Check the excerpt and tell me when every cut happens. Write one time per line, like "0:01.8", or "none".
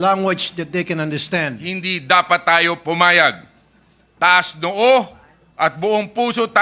0:01.6